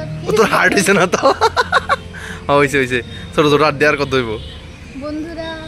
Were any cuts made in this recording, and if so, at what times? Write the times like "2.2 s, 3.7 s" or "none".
none

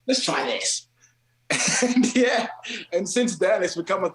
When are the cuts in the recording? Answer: none

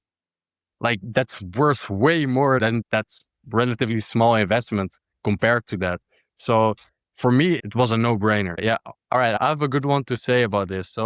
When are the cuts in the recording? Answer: 2.8 s, 7.6 s, 8.5 s

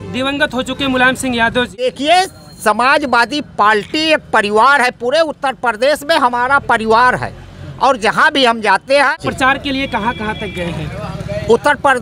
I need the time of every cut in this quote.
1.9 s, 9.2 s

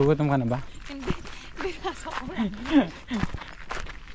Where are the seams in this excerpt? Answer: none

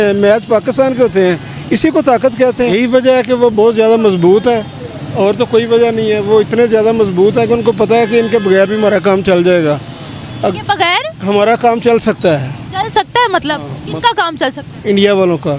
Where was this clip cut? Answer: 2.7 s

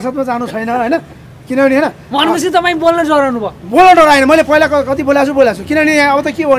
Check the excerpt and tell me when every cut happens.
none

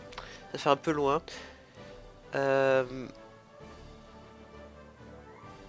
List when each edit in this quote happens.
none

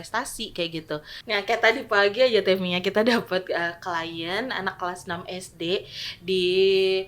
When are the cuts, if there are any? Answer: 1.3 s

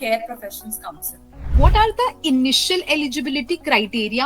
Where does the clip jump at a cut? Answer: 1.5 s

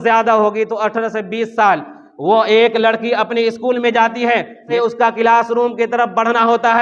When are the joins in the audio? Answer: 4.7 s

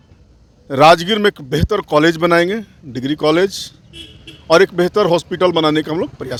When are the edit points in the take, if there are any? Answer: none

